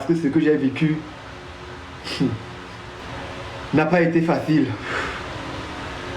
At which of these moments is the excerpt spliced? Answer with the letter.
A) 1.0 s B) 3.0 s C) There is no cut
B